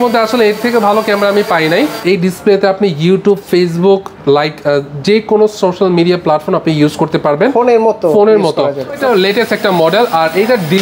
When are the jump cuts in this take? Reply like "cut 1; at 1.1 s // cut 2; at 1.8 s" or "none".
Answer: cut 1; at 2.0 s // cut 2; at 9.0 s